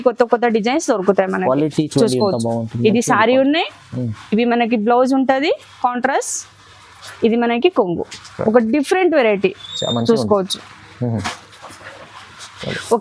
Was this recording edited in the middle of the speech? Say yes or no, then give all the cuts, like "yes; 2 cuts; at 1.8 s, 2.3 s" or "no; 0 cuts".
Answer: no; 0 cuts